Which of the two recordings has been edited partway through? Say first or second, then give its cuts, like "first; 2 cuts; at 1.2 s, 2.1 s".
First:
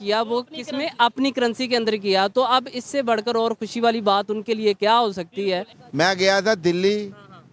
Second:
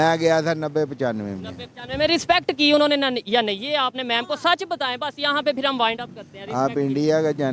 first; 1 cut; at 5.8 s